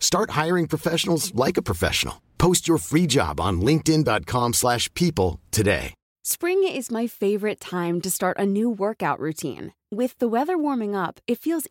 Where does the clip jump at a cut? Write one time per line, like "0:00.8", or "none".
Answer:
none